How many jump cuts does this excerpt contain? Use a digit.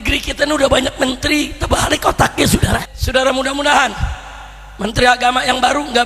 1